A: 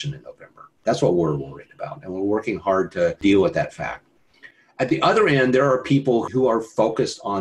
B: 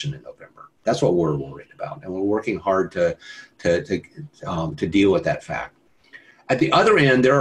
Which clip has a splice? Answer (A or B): A